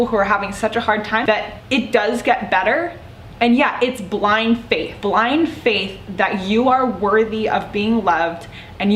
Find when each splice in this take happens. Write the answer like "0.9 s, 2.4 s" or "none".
1.3 s, 4.9 s